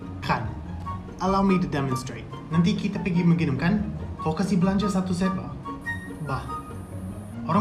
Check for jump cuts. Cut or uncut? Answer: uncut